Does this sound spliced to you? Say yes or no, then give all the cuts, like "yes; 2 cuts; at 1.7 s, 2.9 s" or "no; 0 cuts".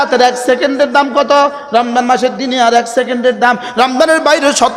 no; 0 cuts